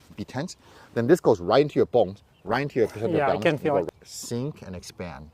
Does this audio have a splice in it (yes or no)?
yes